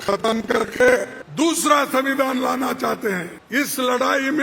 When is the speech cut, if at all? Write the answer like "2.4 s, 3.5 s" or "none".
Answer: 1.2 s, 3.3 s